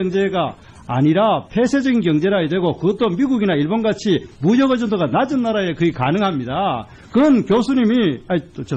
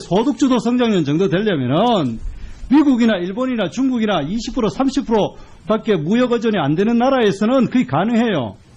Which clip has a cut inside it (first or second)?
second